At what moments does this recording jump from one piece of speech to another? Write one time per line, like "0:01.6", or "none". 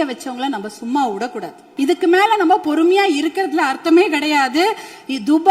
0:01.6